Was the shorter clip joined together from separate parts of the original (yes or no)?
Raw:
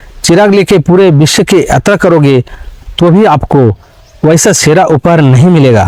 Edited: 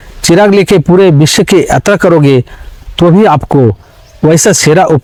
no